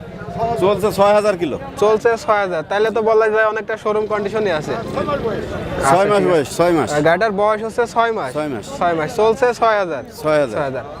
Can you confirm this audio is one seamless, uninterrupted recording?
yes; 0 cuts

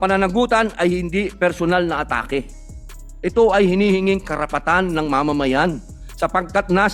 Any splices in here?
no; 0 cuts

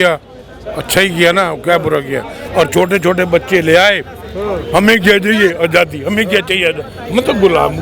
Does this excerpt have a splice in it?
yes; 1 cut; at 2.4 s

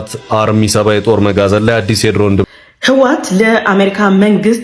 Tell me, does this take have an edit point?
yes; 1 cut; at 2.5 s

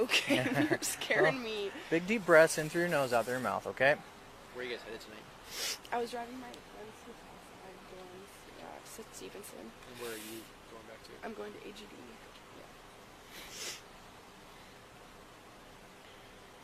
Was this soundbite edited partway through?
no; 0 cuts

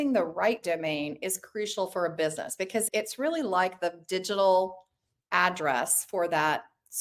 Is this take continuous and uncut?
yes; 0 cuts

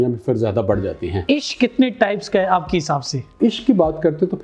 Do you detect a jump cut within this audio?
yes; 2 cuts; at 1.1 s, 3.4 s

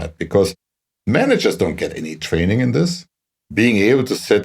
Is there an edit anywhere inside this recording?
yes; 1 cut; at 3.2 s

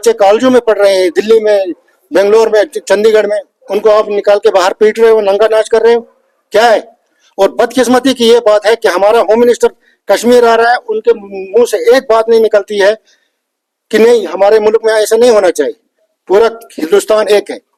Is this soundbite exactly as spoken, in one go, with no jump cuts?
yes; 0 cuts

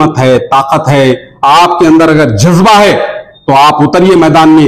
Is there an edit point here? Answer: no; 0 cuts

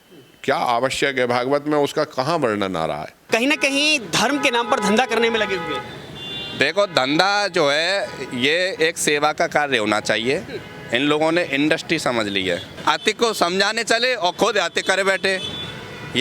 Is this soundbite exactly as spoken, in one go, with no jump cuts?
no; 2 cuts; at 3.1 s, 12.7 s

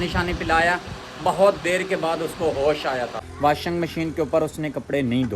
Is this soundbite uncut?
no; 1 cut; at 3.3 s

